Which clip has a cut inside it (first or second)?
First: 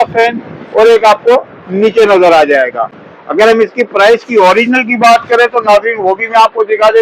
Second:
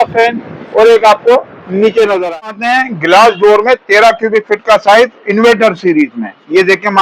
second